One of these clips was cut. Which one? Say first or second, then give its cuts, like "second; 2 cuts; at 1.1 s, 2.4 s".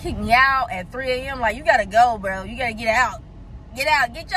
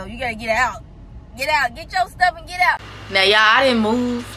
second; 1 cut; at 2.9 s